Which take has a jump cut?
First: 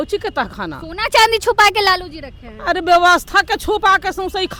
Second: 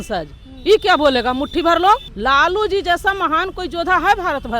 second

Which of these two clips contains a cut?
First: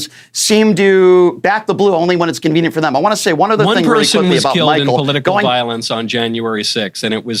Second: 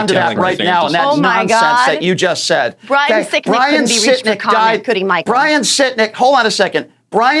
second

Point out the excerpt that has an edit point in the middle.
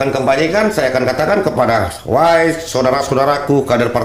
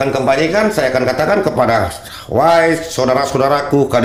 first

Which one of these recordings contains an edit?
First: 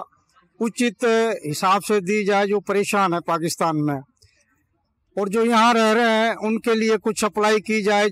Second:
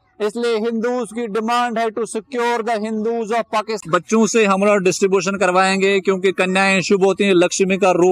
second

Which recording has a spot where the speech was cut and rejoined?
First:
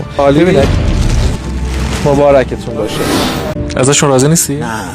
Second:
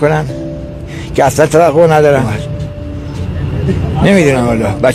first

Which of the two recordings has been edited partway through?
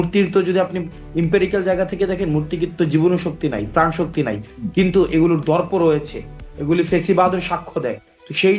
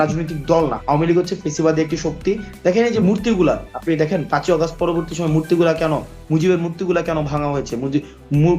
second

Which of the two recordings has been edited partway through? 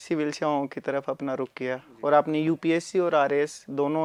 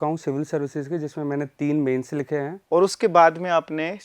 second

